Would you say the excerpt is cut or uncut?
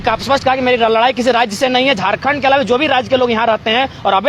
uncut